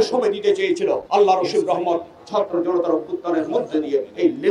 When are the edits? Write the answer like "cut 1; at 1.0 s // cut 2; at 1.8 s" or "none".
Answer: cut 1; at 1.0 s